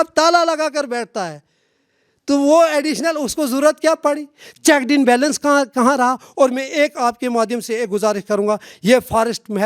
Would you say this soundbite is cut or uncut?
uncut